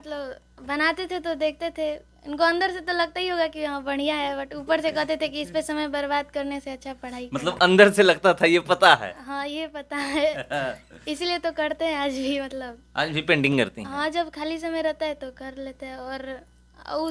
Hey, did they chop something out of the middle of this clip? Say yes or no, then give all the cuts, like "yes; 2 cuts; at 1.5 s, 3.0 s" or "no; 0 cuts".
no; 0 cuts